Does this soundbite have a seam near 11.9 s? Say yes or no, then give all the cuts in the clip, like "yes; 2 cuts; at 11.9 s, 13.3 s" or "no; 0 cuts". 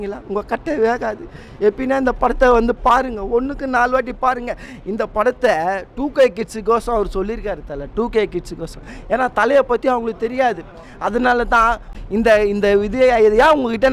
yes; 1 cut; at 11.9 s